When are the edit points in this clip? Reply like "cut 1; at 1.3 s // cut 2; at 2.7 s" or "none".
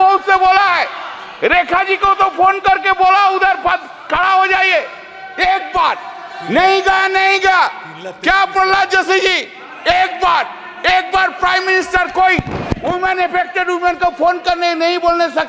none